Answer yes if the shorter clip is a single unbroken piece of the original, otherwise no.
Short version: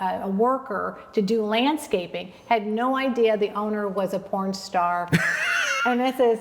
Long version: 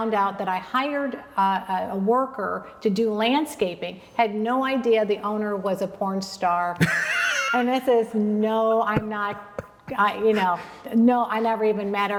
yes